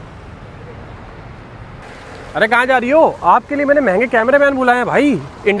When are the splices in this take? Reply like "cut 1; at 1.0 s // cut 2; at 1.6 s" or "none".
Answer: cut 1; at 1.8 s